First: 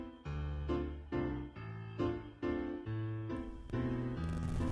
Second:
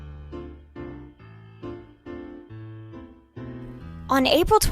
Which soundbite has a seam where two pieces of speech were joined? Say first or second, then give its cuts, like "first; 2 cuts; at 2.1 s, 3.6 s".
second; 1 cut; at 3.8 s